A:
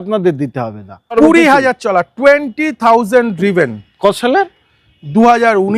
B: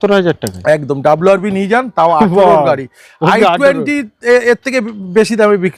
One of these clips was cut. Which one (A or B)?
A